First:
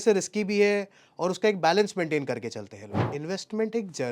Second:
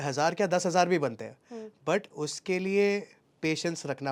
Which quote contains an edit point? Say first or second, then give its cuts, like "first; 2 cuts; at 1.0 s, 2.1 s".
first; 1 cut; at 3.0 s